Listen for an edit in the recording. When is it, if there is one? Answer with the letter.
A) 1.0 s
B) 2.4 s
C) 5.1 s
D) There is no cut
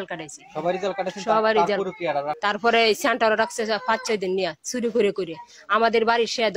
B